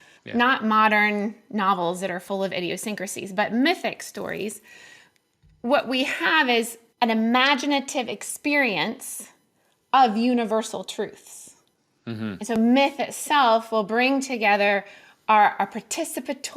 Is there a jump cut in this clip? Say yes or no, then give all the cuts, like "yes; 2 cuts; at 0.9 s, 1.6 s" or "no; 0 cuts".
yes; 1 cut; at 6.8 s